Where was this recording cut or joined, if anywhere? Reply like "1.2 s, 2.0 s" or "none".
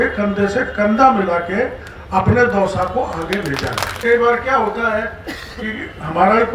4.0 s